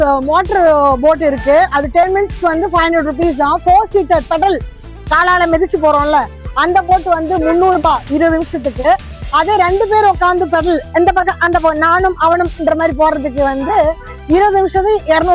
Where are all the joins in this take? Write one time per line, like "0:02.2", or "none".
none